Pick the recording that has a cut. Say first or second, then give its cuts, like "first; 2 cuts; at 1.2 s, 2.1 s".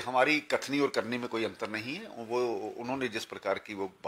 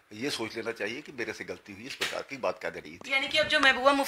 second; 1 cut; at 2.9 s